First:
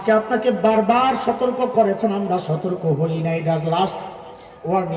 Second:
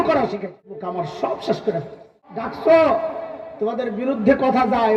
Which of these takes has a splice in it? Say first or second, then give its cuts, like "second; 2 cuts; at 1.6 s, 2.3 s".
second; 2 cuts; at 0.8 s, 2.5 s